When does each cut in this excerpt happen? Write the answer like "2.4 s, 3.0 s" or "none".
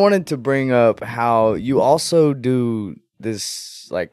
none